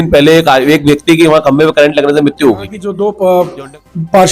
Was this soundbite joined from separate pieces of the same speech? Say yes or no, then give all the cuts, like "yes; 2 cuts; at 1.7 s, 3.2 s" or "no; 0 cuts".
yes; 1 cut; at 2.8 s